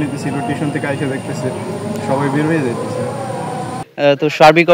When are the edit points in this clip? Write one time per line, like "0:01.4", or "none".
0:03.8